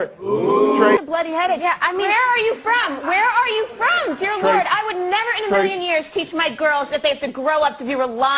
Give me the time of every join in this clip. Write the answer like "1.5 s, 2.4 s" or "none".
1.0 s